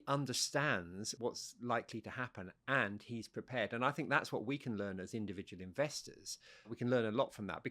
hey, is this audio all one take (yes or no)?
no